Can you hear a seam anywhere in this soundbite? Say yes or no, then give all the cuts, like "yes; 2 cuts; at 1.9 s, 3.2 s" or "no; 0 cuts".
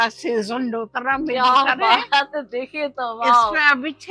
no; 0 cuts